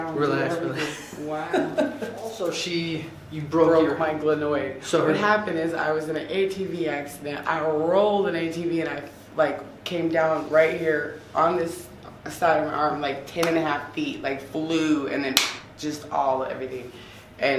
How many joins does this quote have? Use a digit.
1